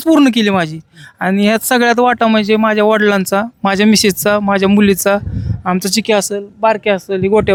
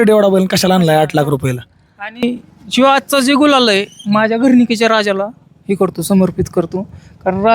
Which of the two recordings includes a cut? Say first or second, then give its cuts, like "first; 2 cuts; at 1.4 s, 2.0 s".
second; 1 cut; at 2.2 s